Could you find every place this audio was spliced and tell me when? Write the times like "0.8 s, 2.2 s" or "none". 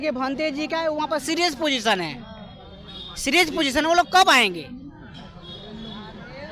none